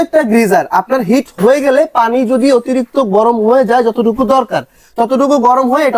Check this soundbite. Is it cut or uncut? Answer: uncut